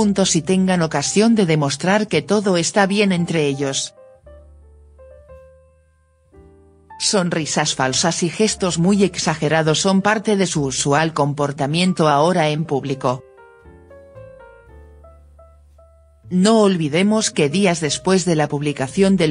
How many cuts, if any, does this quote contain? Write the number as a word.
zero